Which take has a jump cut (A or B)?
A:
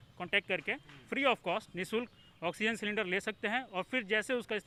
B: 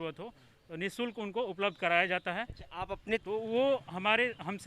B